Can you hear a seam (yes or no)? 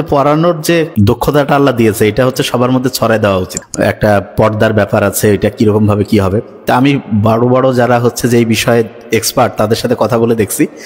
yes